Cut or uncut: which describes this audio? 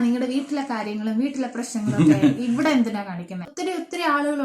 cut